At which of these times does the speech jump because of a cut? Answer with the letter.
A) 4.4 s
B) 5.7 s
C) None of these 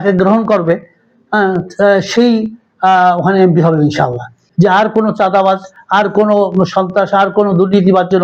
A